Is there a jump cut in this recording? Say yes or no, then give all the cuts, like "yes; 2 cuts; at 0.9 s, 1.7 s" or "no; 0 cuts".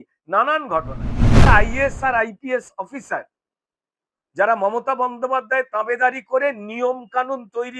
yes; 1 cut; at 1.5 s